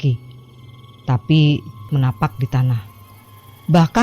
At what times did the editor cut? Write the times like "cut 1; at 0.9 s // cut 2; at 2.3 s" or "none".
cut 1; at 1.9 s